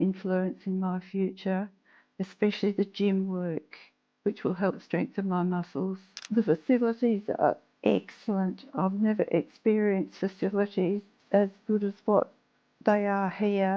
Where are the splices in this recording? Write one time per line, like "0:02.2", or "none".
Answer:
0:06.1
0:11.1